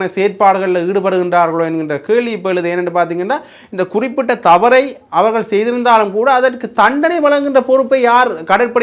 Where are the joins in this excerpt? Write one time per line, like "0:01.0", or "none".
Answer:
none